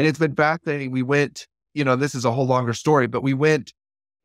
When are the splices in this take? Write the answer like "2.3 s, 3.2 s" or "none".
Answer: none

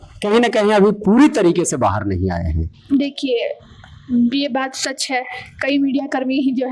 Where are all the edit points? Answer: none

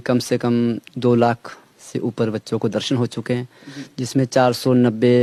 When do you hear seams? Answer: none

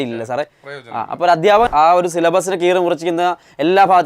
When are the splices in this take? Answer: 1.7 s

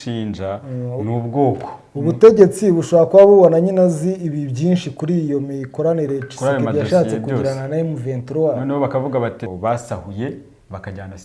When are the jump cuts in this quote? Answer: 9.5 s

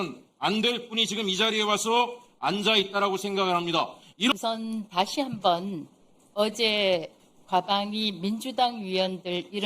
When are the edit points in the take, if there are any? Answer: 4.3 s

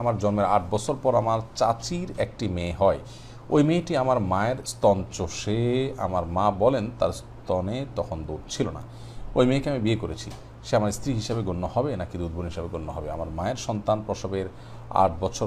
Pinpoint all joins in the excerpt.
none

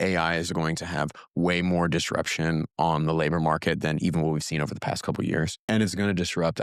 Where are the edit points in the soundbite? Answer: none

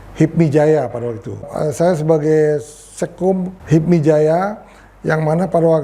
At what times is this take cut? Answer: 1.5 s, 3.6 s

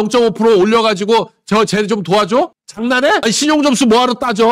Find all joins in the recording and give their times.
none

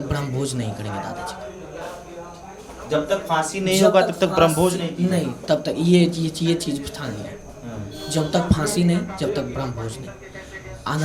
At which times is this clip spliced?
none

